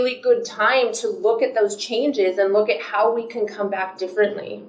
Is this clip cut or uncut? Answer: uncut